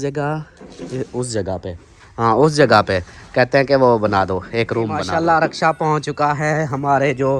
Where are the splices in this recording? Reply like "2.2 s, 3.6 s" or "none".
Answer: 5.0 s